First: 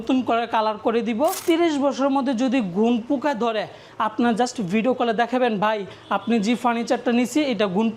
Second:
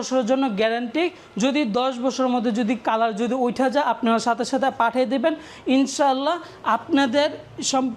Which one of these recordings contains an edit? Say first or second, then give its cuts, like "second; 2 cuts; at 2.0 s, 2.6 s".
first; 1 cut; at 1.4 s